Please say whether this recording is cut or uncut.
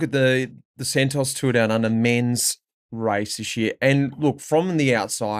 uncut